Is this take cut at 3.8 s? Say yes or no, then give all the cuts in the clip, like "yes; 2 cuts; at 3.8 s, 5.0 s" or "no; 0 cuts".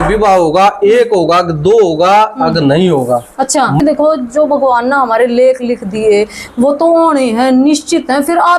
yes; 1 cut; at 3.8 s